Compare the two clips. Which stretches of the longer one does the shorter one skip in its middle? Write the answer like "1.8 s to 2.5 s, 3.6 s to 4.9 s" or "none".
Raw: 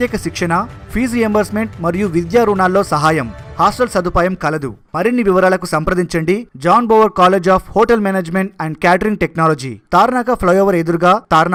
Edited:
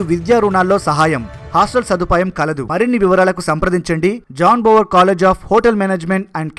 4.7 s to 4.9 s